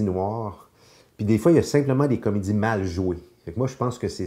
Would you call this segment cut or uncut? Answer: uncut